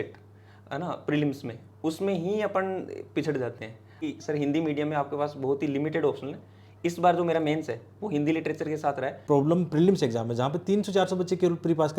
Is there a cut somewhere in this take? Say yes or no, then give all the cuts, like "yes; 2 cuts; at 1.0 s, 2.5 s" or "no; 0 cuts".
yes; 2 cuts; at 4.1 s, 9.2 s